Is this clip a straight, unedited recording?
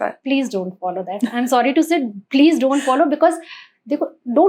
yes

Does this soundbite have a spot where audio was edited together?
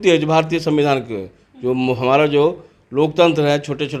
no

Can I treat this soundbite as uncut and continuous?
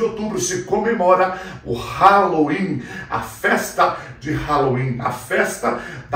yes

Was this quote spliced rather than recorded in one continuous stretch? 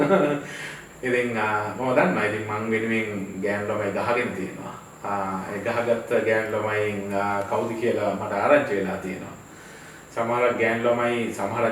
no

